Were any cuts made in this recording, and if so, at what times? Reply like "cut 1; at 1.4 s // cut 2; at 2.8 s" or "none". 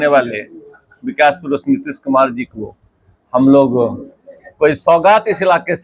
none

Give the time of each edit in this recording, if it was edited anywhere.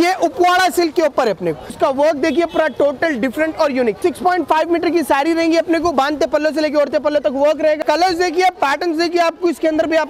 cut 1; at 1.7 s // cut 2; at 4.0 s // cut 3; at 7.8 s

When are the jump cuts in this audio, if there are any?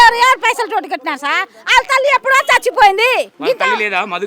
cut 1; at 3.3 s

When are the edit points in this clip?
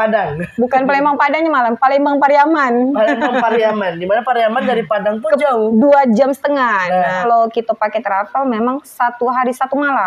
cut 1; at 7.2 s

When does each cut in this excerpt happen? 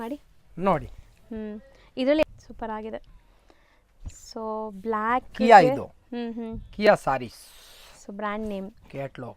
cut 1; at 2.2 s

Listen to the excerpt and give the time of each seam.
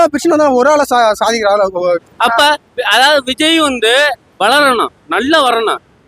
cut 1; at 2.0 s

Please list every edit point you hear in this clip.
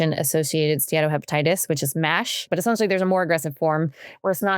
cut 1; at 2.5 s

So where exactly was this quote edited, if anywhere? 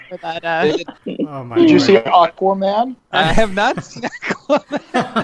cut 1; at 1.0 s // cut 2; at 3.0 s

